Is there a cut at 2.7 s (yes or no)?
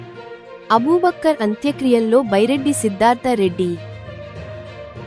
no